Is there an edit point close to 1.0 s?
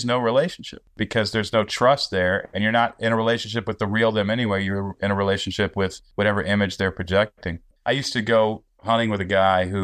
yes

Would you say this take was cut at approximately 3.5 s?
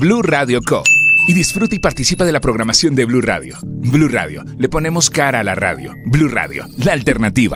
no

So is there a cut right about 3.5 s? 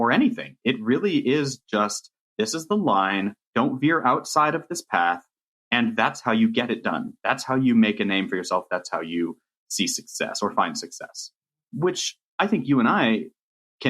yes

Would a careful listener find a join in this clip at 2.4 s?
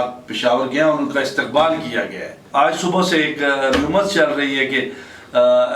yes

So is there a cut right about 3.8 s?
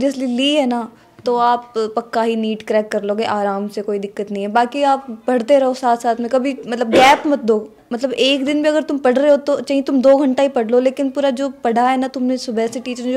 no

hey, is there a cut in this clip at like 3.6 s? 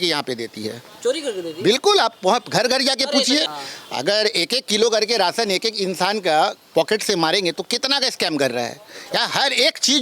yes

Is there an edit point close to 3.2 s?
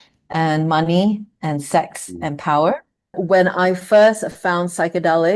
yes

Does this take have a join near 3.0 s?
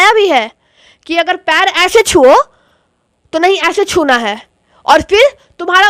no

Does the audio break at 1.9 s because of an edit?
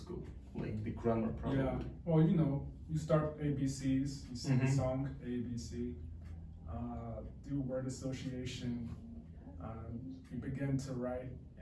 no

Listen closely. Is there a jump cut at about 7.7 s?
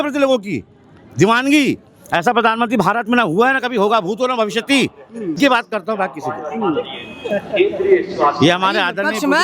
no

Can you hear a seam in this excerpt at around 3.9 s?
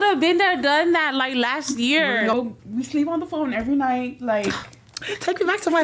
no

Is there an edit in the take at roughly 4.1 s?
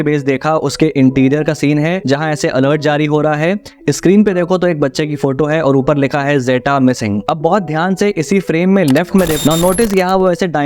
no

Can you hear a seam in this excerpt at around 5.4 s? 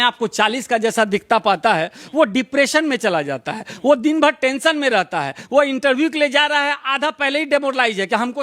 no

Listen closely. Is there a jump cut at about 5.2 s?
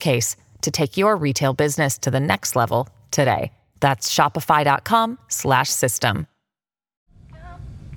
no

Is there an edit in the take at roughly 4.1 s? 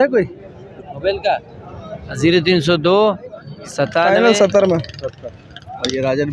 yes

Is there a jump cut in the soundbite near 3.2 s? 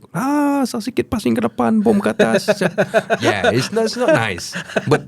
yes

